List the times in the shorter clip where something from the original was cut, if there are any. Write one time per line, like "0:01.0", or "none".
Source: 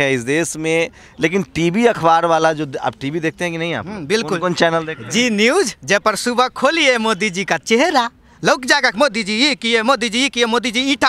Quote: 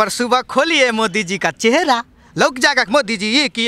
none